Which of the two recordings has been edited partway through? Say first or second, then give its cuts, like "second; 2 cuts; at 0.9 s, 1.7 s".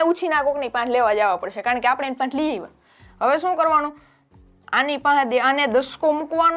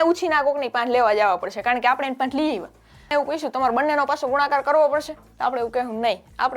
second; 1 cut; at 3.1 s